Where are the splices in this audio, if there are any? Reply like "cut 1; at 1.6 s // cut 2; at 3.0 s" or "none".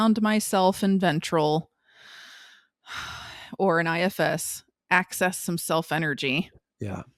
none